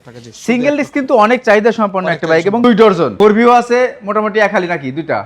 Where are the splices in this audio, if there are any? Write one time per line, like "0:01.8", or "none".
0:02.6